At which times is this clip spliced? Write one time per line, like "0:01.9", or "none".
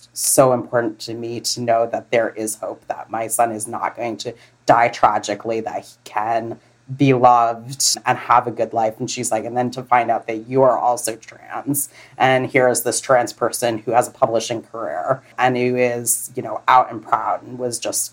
0:07.9
0:15.3

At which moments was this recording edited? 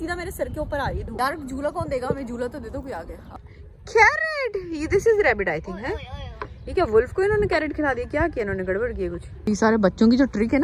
0:01.1
0:03.5
0:09.3

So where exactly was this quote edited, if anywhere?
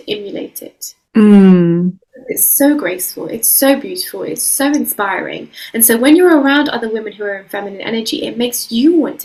none

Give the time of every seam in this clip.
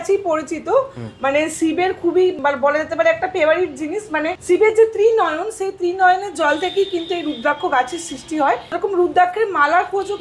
0:02.4
0:04.3
0:08.7

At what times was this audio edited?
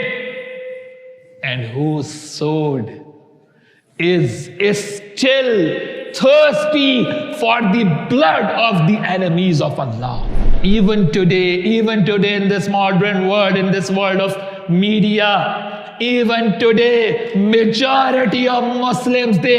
0:10.5

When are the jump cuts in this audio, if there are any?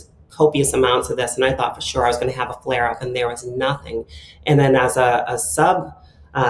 none

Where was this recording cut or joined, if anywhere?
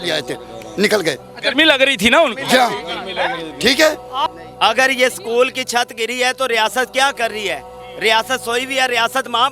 0:04.3

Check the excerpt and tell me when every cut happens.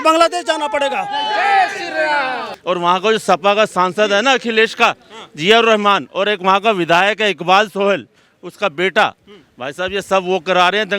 0:02.4

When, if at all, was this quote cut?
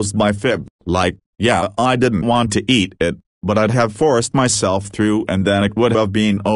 none

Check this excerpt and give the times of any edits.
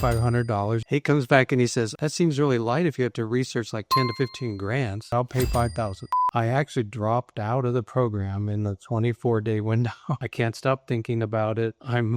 0:00.8
0:02.0
0:05.1
0:06.0
0:10.2

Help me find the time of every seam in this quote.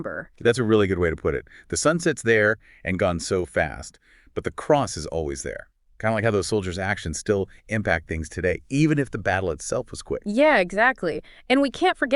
none

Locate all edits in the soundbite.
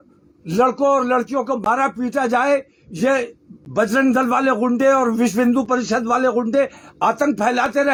none

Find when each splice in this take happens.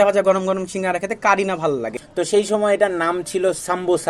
0:02.0

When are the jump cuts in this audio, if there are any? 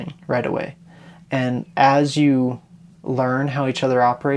none

